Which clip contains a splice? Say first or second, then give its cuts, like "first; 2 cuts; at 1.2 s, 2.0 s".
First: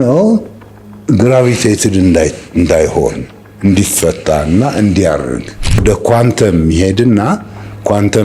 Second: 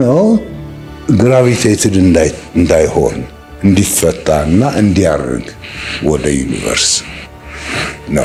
first; 1 cut; at 5.8 s